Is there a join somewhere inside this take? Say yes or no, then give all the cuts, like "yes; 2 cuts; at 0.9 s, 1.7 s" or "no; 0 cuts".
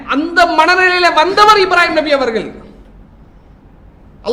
no; 0 cuts